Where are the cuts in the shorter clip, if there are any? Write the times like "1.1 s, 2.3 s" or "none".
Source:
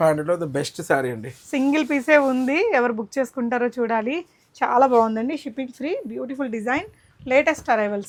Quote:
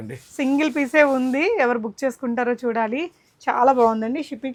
none